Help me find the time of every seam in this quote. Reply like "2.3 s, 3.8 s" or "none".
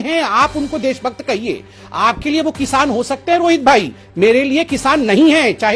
none